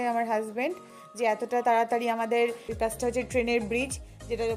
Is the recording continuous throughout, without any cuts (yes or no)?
no